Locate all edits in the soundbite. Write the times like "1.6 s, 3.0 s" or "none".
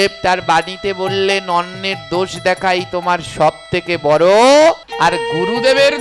4.9 s